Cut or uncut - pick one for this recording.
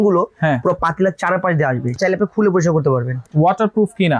cut